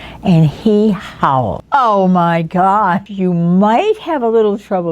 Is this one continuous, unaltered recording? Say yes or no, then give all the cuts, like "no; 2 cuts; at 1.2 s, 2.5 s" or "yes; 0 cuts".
no; 2 cuts; at 1.6 s, 3.0 s